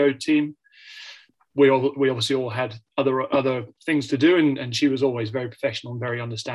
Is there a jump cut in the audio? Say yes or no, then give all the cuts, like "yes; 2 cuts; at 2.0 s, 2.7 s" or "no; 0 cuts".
yes; 1 cut; at 1.3 s